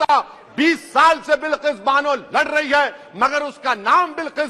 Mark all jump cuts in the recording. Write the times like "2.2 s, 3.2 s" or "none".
none